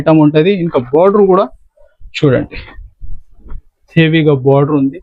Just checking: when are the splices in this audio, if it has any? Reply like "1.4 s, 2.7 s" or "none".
none